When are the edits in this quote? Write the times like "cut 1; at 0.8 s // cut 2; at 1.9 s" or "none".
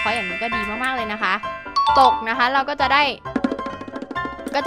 none